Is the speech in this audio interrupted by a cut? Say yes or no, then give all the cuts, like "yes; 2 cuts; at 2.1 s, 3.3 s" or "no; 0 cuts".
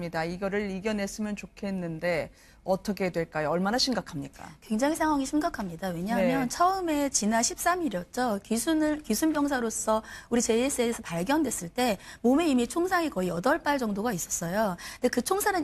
yes; 1 cut; at 12.1 s